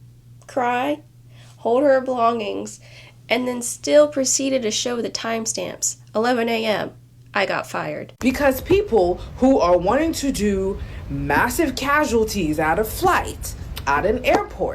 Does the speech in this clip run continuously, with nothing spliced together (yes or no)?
no